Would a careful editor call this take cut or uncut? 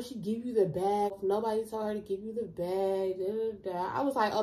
cut